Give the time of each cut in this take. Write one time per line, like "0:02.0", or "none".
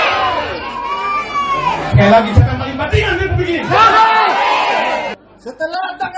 0:05.2

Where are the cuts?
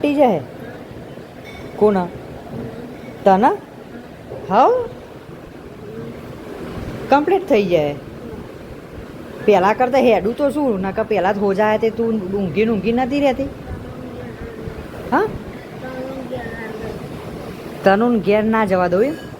none

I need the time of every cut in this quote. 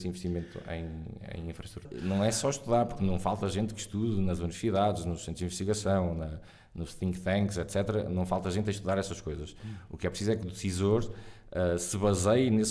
0:01.9

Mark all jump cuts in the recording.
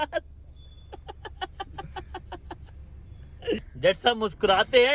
0:03.7

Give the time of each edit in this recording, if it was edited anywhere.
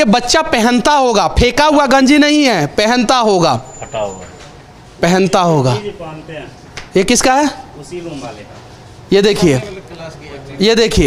none

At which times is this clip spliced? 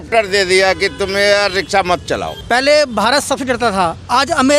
0:02.3

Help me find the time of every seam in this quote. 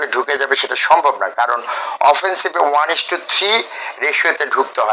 none

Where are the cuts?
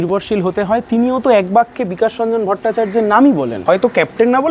0:03.6

